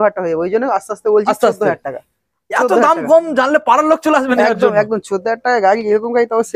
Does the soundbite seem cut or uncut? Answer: uncut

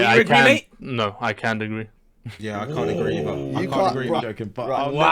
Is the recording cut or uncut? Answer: cut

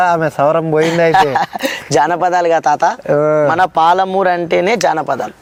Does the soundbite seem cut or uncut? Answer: uncut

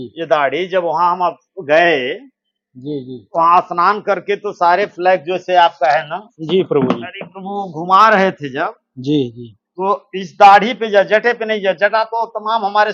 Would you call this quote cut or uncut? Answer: uncut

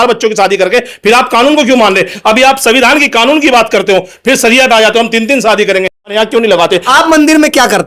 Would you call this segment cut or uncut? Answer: cut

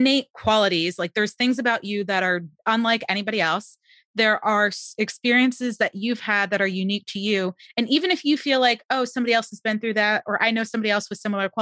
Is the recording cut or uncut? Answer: uncut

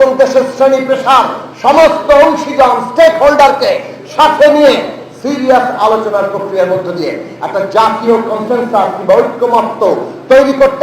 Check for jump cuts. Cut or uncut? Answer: uncut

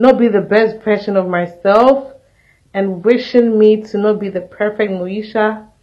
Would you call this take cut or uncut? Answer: uncut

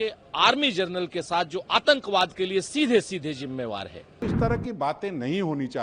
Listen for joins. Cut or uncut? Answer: cut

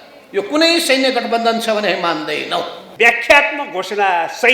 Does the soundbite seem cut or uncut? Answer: cut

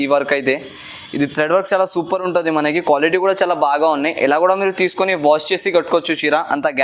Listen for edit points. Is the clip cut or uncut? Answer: uncut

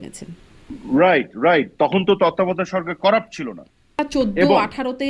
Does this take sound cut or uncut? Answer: cut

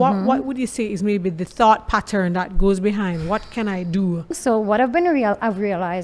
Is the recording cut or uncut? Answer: cut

